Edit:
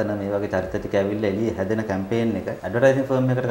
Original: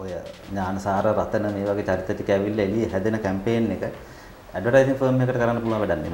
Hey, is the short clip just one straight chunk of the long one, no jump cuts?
no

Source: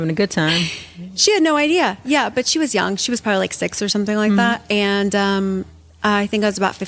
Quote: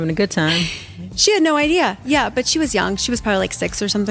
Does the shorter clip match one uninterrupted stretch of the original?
yes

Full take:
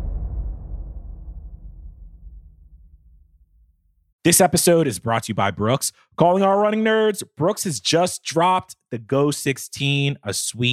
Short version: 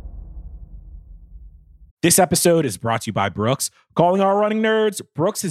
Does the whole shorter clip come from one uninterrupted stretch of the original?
no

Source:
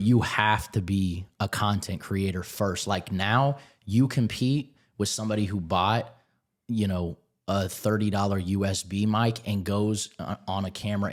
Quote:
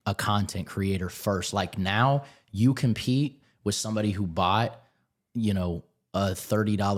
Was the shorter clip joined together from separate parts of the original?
no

